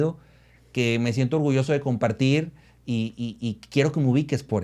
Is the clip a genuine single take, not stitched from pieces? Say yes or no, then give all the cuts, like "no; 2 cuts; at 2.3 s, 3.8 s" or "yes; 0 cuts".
yes; 0 cuts